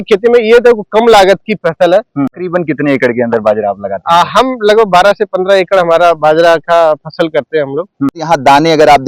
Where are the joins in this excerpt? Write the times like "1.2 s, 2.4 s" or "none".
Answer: 2.3 s, 8.2 s